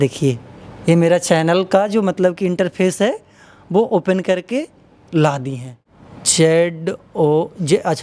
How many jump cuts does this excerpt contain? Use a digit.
1